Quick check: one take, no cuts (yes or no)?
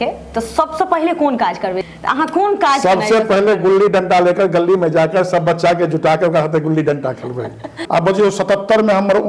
no